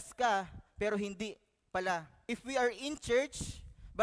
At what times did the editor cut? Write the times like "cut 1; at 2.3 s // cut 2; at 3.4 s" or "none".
cut 1; at 2.1 s